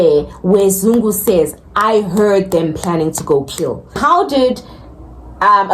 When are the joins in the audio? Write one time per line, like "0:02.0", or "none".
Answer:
0:04.0